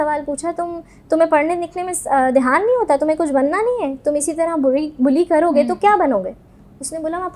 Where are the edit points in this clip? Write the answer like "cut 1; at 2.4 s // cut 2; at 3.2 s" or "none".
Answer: none